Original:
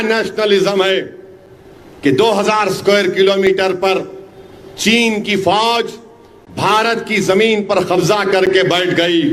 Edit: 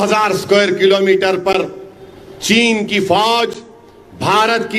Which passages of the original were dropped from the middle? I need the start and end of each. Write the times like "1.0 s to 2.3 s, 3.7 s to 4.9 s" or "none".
none